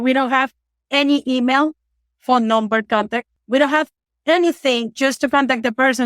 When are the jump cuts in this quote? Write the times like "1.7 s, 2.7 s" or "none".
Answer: 3.3 s